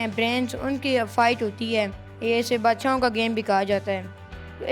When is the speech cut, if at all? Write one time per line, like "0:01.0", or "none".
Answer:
0:02.0